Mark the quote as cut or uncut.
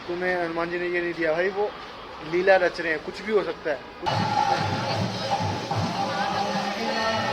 cut